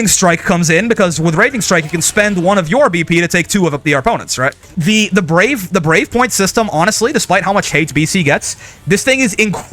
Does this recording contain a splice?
yes; 1 cut; at 4.7 s

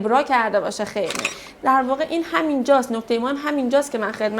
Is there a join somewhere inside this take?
yes; 1 cut; at 1.4 s

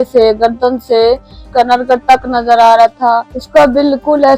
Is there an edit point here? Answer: yes; 2 cuts; at 1.4 s, 3.4 s

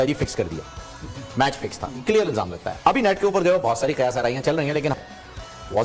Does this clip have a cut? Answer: yes; 1 cut; at 4.9 s

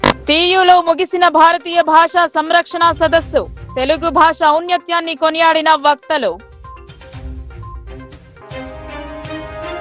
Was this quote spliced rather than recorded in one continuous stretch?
no; 0 cuts

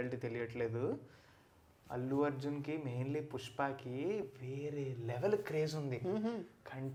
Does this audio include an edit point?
no; 0 cuts

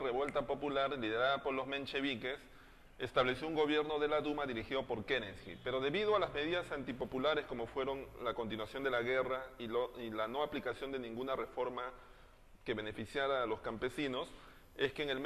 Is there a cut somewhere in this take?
yes; 1 cut; at 11.9 s

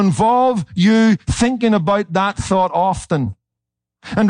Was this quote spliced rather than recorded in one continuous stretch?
no; 0 cuts

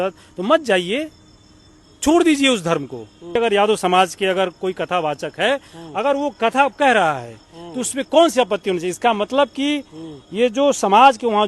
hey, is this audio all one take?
no; 1 cut; at 3.3 s

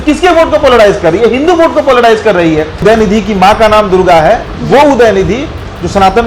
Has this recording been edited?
yes; 1 cut; at 2.8 s

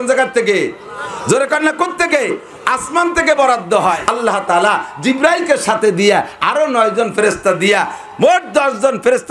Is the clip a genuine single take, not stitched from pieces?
no; 1 cut; at 4.0 s

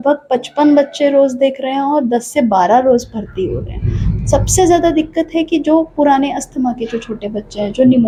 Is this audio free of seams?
yes; 0 cuts

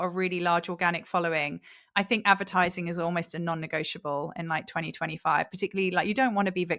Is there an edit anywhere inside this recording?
no; 0 cuts

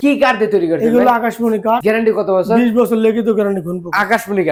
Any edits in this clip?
no; 0 cuts

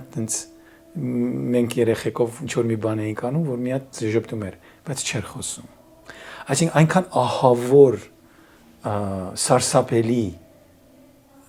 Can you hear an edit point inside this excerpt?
no; 0 cuts

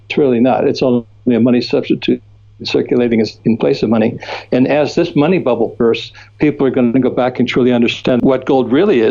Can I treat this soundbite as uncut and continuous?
no; 1 cut; at 8.2 s

